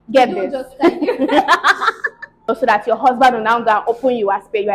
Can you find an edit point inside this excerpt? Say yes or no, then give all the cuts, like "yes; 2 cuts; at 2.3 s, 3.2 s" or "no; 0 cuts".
yes; 1 cut; at 2.5 s